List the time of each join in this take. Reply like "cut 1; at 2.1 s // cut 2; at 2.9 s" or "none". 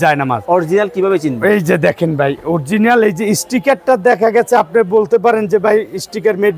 none